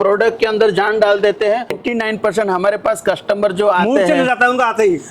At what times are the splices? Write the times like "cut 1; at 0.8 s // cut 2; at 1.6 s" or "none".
cut 1; at 1.8 s